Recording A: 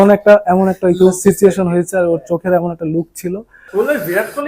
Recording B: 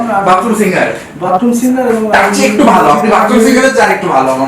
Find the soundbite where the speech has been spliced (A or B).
A